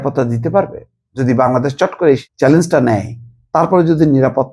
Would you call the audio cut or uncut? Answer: cut